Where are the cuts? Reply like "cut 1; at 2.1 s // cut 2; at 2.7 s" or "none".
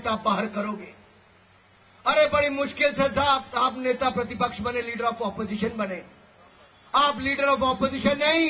none